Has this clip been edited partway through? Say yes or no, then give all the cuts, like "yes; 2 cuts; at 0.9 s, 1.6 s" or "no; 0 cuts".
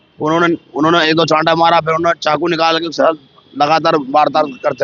no; 0 cuts